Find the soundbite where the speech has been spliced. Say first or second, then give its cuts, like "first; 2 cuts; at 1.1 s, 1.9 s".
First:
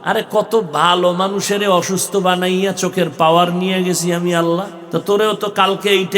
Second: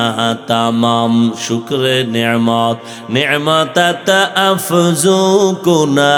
first; 1 cut; at 4.8 s